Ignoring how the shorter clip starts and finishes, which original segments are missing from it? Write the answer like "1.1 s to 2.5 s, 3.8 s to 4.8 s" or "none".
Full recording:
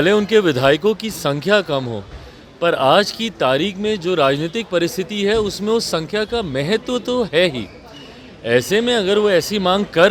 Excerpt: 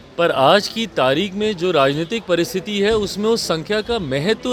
none

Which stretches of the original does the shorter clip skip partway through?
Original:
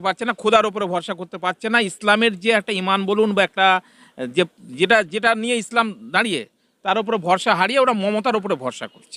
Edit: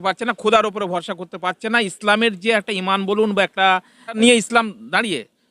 4.2 s to 5.4 s

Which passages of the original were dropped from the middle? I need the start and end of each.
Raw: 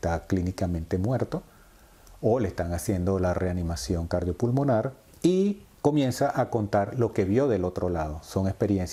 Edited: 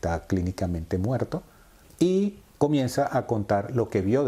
1.8 s to 5.0 s

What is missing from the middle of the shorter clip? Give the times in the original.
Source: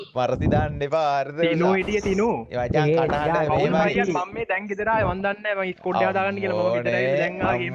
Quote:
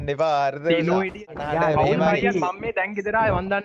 2.1 s to 3.1 s

